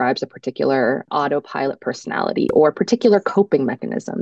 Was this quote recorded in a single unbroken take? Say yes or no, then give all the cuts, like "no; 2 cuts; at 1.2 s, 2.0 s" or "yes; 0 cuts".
no; 1 cut; at 1.1 s